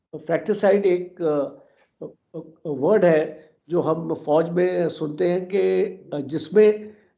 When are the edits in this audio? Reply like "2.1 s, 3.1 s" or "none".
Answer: none